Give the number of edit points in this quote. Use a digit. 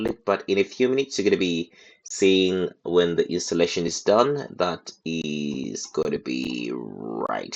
0